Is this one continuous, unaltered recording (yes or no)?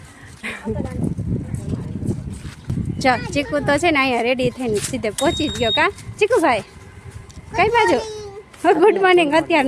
yes